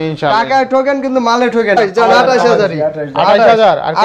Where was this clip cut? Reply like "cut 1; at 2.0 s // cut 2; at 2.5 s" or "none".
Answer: cut 1; at 1.8 s